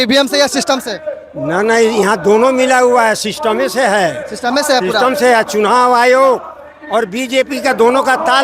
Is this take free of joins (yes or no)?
yes